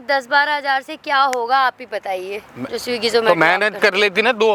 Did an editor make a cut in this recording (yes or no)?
no